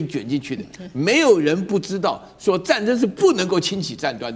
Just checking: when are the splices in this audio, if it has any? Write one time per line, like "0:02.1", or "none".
none